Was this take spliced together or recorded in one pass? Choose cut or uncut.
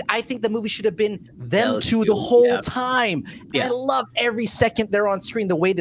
cut